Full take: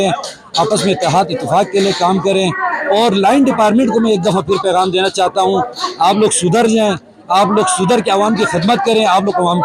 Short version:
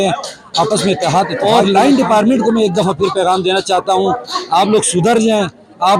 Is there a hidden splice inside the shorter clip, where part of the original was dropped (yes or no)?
yes